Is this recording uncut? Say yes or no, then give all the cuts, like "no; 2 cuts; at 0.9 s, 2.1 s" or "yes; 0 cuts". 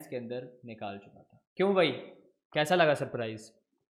yes; 0 cuts